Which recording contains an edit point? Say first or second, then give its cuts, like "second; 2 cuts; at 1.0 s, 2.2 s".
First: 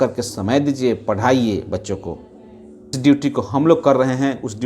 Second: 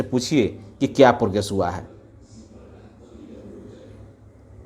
first; 1 cut; at 3.0 s